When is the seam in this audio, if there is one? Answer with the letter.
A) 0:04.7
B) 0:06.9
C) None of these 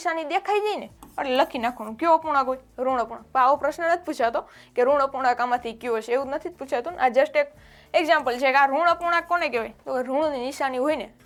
C